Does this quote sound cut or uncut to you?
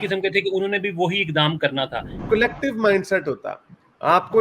cut